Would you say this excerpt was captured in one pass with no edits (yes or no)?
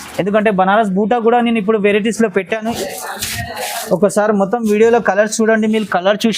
no